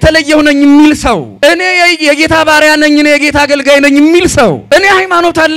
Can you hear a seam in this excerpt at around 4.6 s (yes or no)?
yes